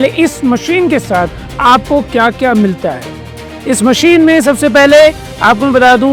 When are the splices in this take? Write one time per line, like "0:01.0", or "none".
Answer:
none